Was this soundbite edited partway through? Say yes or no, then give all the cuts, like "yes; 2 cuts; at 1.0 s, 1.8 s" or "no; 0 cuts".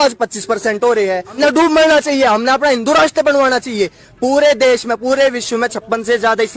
yes; 1 cut; at 1.3 s